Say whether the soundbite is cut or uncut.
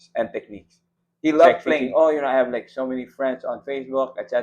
cut